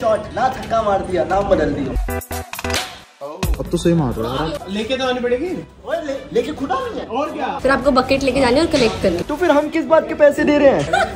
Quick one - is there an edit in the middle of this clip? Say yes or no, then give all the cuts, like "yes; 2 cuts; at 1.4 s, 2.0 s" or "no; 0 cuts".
yes; 4 cuts; at 2.0 s, 4.6 s, 7.5 s, 9.2 s